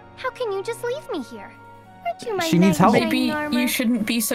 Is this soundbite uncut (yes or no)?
yes